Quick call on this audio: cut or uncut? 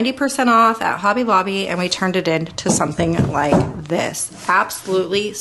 uncut